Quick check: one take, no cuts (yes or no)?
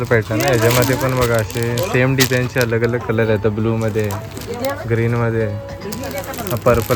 yes